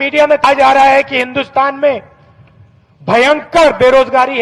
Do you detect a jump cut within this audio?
yes; 1 cut; at 1.2 s

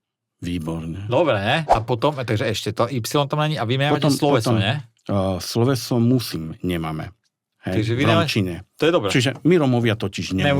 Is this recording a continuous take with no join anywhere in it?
no; 1 cut; at 1.8 s

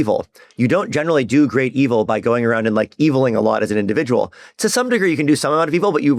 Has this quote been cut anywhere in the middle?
no; 0 cuts

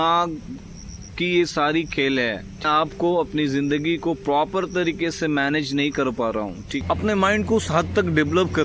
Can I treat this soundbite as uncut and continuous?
no; 2 cuts; at 2.6 s, 6.8 s

